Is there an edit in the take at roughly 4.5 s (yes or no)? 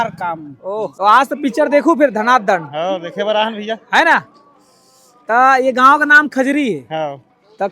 no